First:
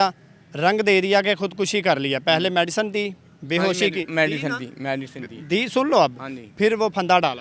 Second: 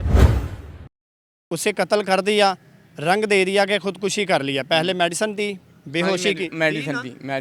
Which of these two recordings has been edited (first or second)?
second